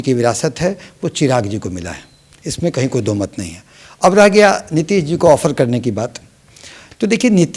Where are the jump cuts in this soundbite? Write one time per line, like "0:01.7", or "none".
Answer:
none